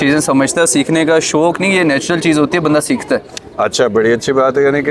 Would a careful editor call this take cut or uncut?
uncut